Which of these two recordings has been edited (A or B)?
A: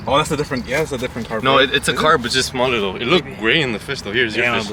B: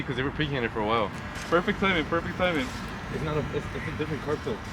B